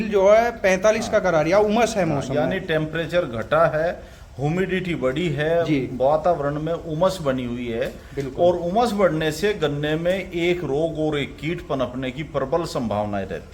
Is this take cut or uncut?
uncut